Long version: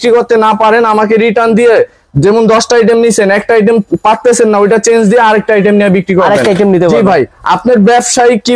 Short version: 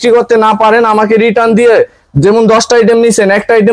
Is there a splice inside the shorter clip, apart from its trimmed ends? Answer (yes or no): no